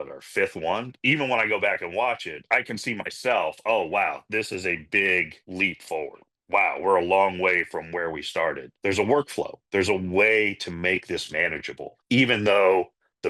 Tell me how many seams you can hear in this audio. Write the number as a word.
four